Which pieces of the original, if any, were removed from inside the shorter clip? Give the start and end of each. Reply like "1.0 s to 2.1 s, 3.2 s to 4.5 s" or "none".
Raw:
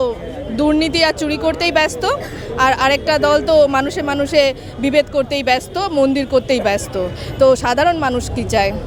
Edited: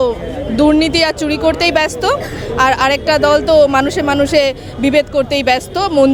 none